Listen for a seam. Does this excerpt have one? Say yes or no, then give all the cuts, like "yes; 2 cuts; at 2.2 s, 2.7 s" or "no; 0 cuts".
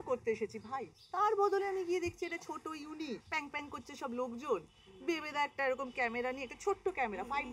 yes; 1 cut; at 3.2 s